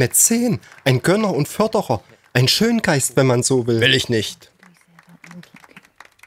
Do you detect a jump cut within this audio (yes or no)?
no